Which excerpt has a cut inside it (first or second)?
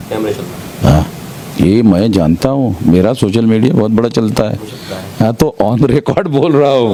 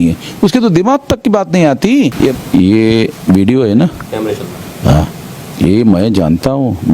second